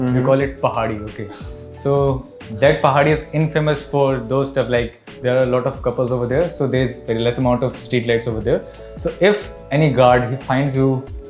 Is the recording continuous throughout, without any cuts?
yes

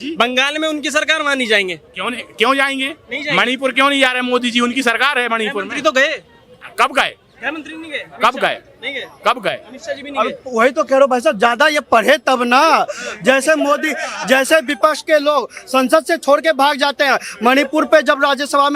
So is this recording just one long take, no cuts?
yes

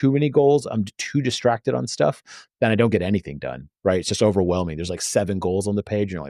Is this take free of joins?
yes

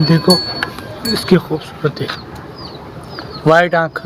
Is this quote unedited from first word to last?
yes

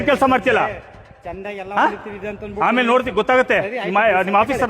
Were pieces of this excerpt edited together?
yes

